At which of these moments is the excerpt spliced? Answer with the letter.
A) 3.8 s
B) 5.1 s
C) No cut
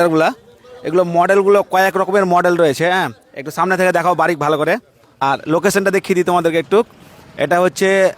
C